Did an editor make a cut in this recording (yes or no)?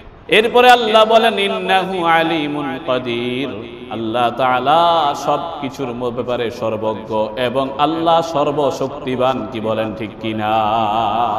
no